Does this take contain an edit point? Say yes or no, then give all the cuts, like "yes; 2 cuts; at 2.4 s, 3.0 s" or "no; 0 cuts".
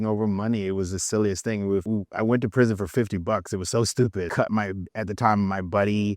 yes; 2 cuts; at 1.8 s, 4.3 s